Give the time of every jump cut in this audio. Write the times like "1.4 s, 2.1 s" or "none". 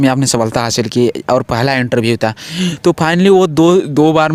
none